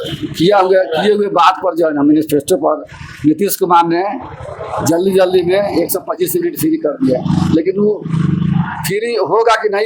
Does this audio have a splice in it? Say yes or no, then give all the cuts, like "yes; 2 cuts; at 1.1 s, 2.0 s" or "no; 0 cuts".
no; 0 cuts